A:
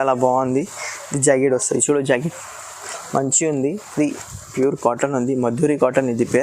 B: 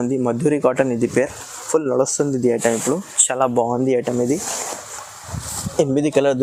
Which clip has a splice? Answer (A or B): A